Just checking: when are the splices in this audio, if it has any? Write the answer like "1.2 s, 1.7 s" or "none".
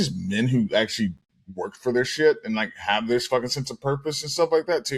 none